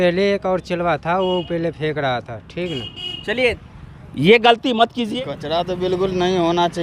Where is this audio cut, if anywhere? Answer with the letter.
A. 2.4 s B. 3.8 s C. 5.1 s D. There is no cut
C